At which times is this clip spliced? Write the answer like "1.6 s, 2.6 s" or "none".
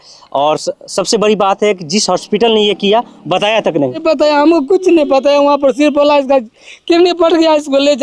4.0 s